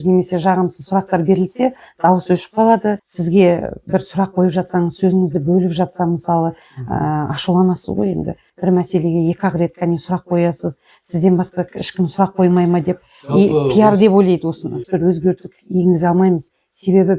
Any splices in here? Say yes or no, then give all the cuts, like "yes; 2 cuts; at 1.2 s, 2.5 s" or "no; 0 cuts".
yes; 3 cuts; at 3.1 s, 8.5 s, 14.8 s